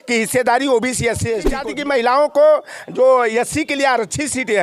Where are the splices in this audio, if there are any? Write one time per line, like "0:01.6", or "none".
0:01.6